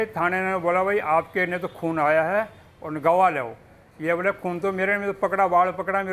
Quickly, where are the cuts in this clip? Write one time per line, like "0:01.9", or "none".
none